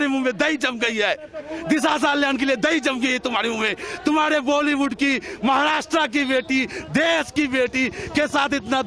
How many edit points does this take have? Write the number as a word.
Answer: zero